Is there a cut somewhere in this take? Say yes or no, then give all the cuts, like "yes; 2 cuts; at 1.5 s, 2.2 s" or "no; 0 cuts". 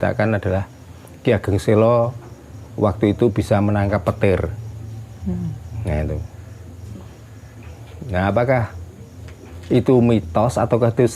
no; 0 cuts